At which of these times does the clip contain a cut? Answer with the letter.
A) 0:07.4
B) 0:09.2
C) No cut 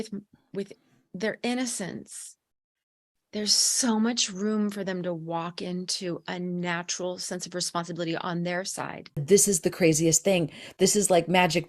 B